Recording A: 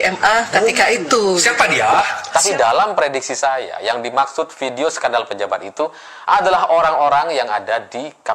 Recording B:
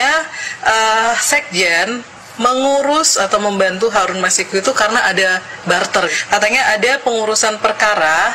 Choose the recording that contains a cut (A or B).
A